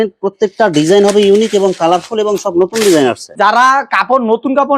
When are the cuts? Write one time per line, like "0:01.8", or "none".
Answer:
0:03.3